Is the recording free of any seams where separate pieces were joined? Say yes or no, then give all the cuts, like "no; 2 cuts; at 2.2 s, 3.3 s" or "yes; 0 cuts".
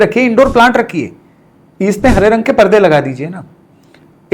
yes; 0 cuts